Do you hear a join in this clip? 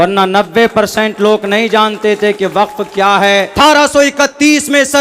yes; 1 cut; at 3.5 s

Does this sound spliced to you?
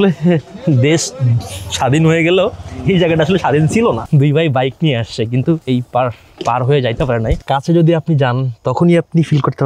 yes; 3 cuts; at 4.0 s, 5.6 s, 7.4 s

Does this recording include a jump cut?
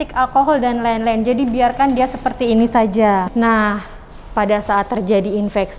yes; 1 cut; at 3.2 s

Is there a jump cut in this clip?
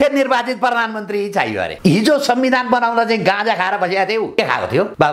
no; 0 cuts

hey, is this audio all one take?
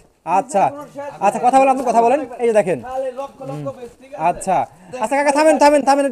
yes; 0 cuts

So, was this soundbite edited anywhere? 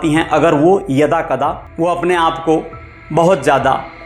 yes; 1 cut; at 1.6 s

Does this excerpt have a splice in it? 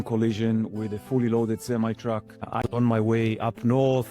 yes; 1 cut; at 2.6 s

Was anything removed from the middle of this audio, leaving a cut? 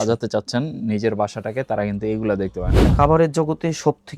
yes; 1 cut; at 2.8 s

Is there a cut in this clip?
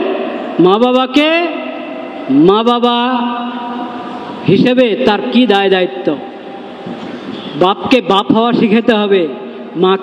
no; 0 cuts

